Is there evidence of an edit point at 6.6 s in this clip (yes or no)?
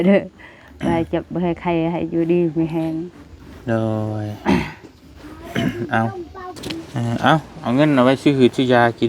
yes